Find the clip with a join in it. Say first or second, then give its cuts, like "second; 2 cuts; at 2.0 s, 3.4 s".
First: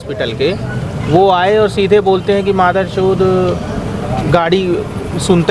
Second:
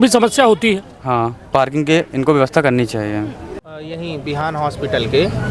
second; 1 cut; at 3.5 s